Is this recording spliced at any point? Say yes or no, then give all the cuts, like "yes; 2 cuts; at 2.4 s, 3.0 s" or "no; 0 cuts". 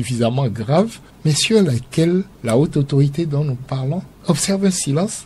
yes; 1 cut; at 2.3 s